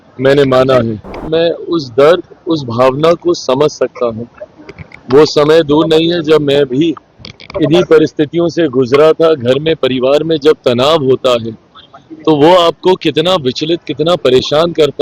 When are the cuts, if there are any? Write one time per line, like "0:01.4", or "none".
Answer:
0:01.2

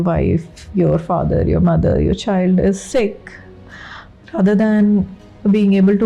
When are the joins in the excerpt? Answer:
none

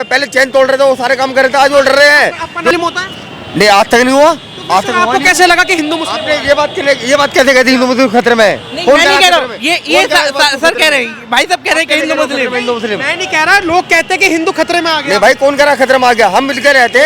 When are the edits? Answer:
0:02.7

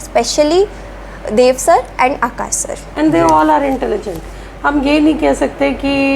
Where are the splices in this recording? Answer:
0:02.8

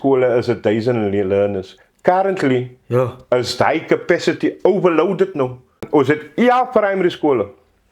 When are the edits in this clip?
0:05.8

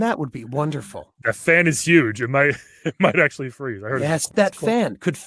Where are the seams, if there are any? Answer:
0:04.3

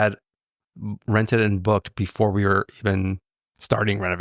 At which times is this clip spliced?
none

